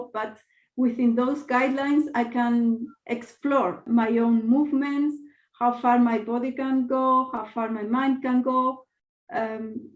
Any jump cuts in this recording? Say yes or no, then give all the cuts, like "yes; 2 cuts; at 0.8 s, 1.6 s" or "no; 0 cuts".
yes; 1 cut; at 3.8 s